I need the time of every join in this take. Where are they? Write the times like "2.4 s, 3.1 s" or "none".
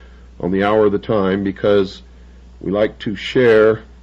none

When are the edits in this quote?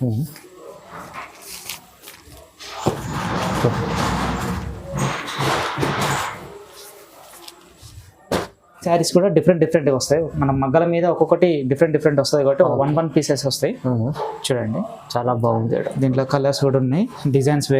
8.8 s

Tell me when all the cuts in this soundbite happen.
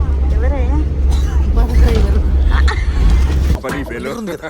3.6 s

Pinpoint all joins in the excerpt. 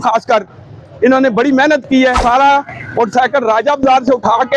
2.2 s

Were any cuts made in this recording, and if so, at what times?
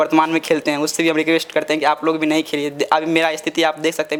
none

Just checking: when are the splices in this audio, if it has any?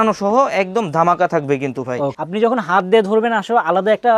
2.2 s

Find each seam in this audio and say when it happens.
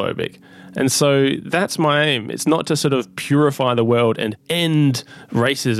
4.4 s

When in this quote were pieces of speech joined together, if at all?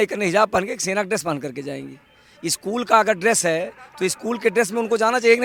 none

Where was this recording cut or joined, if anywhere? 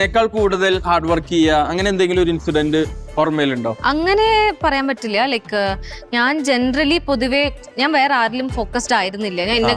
3.7 s

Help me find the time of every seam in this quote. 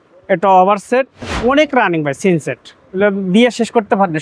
1.3 s

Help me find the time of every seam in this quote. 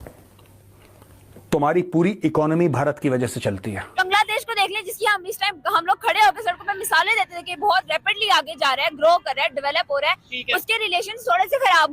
4.0 s

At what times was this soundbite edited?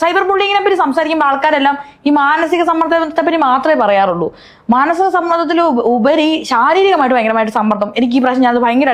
none

